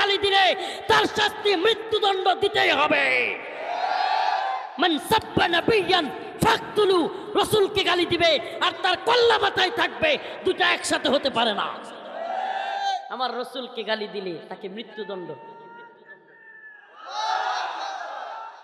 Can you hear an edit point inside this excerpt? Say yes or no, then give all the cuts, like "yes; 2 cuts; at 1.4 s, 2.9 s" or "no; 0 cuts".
no; 0 cuts